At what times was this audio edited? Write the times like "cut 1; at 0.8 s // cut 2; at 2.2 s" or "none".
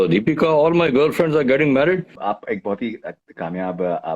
cut 1; at 2.1 s

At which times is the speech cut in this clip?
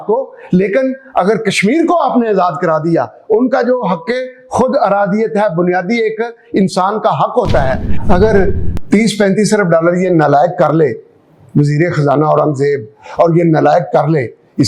cut 1; at 7.9 s

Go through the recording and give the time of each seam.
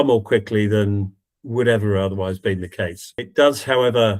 cut 1; at 3.3 s

